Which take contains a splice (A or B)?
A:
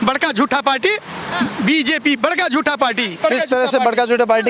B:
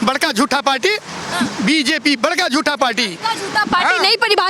A